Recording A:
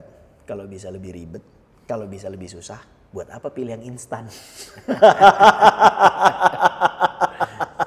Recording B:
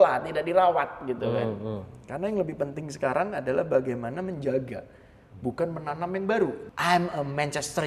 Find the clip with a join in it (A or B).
B